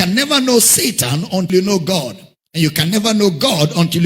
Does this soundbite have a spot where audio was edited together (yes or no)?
yes